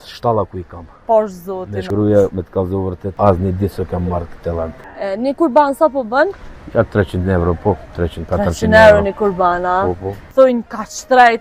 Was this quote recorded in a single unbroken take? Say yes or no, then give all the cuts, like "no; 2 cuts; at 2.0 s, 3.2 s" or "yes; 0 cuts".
no; 4 cuts; at 1.8 s, 3.1 s, 4.9 s, 10.2 s